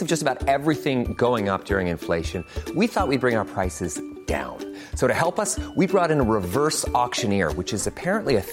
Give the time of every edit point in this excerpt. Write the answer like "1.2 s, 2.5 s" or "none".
none